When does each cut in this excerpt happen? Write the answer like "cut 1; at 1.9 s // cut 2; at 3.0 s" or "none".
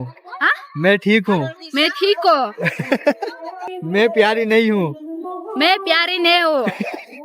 cut 1; at 3.7 s